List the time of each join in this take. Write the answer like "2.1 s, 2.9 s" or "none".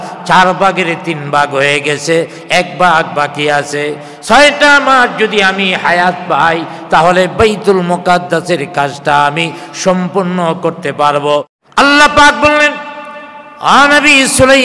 11.5 s

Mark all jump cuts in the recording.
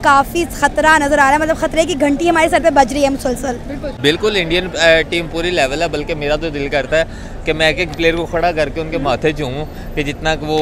3.8 s

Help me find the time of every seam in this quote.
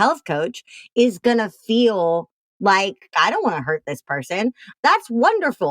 3.1 s, 4.6 s

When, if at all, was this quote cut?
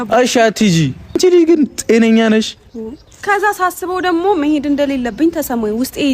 1.1 s, 3.2 s

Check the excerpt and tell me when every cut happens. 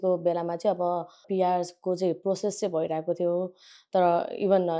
1.2 s

